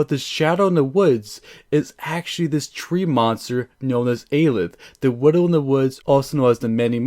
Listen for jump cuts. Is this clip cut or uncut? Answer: cut